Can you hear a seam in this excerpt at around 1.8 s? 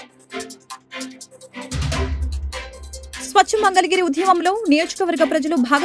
yes; 1 cut; at 1.8 s

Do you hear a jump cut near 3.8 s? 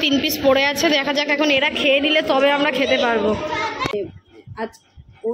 yes; 1 cut; at 3.8 s

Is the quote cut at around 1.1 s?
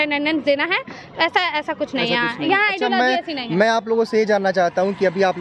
no; 0 cuts

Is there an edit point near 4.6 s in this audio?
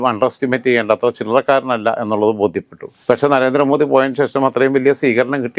no; 1 cut; at 3.0 s

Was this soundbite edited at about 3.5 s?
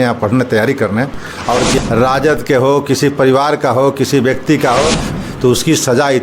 no; 2 cuts; at 1.8 s, 5.1 s

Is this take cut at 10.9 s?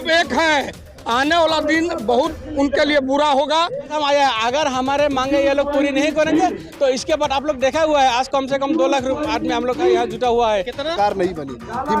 yes; 2 cuts; at 3.9 s, 10.9 s

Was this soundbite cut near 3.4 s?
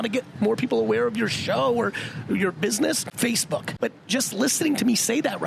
yes; 1 cut; at 3.4 s

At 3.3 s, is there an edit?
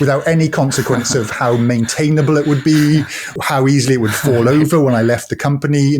yes; 1 cut; at 3.3 s

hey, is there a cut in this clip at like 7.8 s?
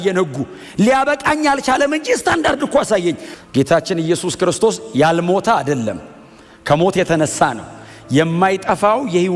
no; 1 cut; at 3.3 s

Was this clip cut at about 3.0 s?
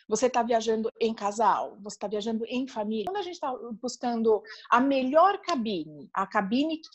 yes; 1 cut; at 3.0 s

